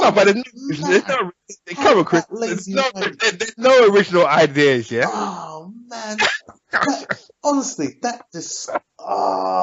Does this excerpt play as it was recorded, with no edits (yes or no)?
yes